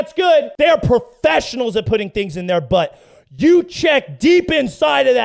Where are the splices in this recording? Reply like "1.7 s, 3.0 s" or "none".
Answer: none